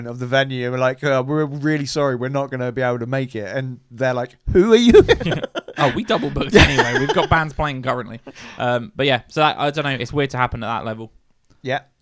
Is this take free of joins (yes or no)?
yes